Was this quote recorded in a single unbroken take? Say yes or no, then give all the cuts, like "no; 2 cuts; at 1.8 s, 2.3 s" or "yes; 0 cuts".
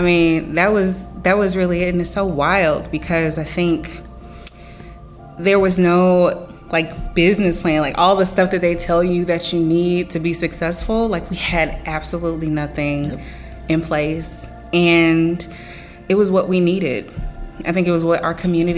yes; 0 cuts